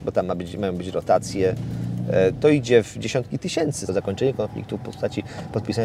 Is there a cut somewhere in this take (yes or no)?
yes